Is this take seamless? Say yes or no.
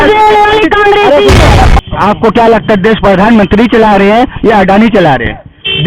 no